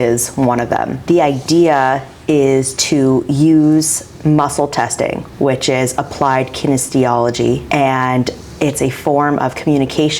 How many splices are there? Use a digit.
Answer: 3